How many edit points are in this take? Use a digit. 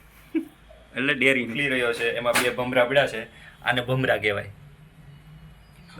1